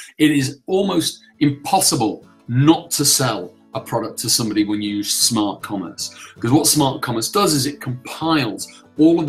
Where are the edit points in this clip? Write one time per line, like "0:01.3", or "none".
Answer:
none